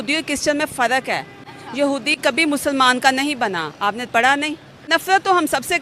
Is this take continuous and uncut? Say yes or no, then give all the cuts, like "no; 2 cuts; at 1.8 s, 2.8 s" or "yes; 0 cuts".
no; 1 cut; at 4.7 s